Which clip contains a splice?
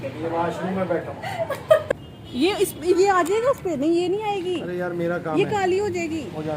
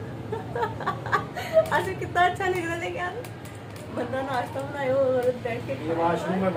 first; 1 cut; at 1.9 s

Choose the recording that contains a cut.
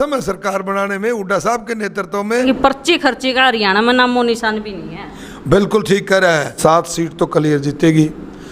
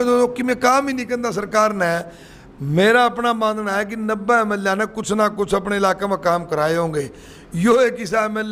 first; 2 cuts; at 2.4 s, 6.5 s

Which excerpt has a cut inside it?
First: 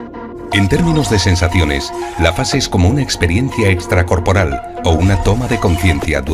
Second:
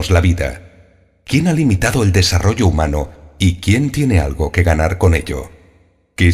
first; 1 cut; at 2.6 s

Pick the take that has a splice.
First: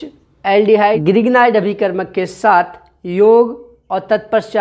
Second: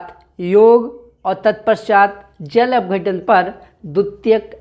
first; 1 cut; at 1.0 s

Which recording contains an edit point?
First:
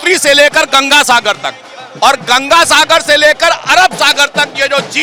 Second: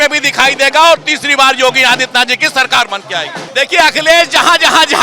second; 1 cut; at 3.5 s

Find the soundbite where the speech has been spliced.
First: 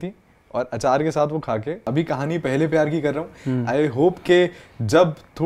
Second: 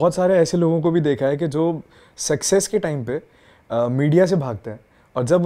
first; 1 cut; at 1.9 s

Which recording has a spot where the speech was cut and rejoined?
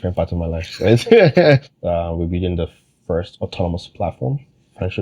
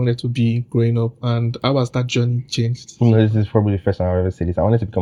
first; 2 cuts; at 1.7 s, 3.3 s

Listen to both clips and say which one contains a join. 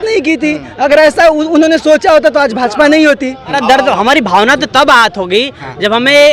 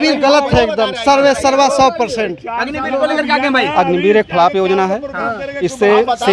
first; 1 cut; at 3.6 s

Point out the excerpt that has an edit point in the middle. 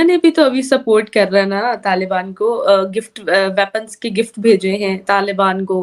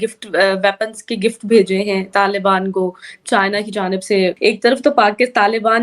second; 1 cut; at 4.4 s

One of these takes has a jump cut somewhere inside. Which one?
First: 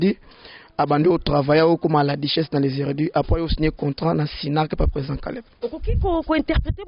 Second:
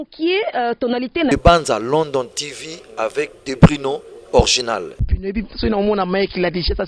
second; 2 cuts; at 1.3 s, 5.0 s

